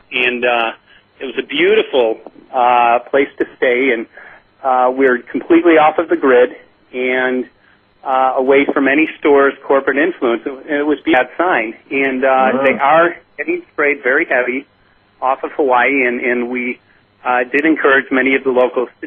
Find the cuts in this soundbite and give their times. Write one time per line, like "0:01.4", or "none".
none